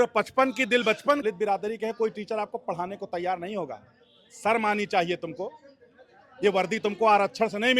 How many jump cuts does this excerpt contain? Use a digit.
1